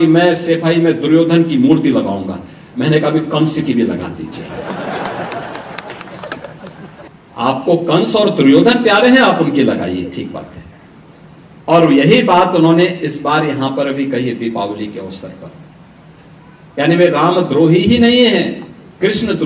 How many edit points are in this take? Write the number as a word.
one